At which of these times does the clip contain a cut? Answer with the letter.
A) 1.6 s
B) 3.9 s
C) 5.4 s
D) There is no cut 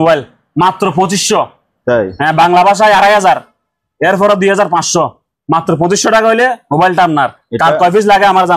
D